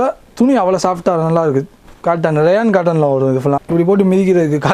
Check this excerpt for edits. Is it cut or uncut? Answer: cut